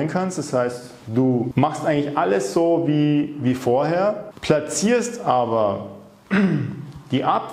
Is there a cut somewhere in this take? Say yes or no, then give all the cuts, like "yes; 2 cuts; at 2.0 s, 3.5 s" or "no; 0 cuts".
yes; 2 cuts; at 1.5 s, 4.3 s